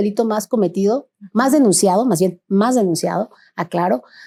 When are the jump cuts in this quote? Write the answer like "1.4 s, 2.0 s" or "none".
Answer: none